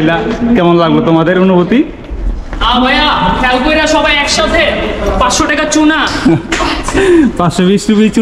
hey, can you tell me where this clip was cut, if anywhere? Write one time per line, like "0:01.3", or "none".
none